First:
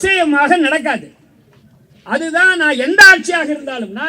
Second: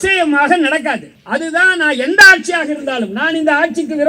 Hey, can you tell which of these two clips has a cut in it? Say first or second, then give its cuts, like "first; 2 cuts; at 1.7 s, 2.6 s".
second; 1 cut; at 1.1 s